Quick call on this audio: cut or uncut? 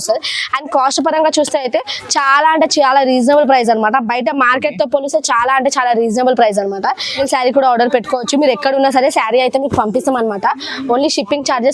cut